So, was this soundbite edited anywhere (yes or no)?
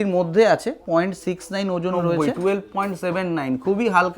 yes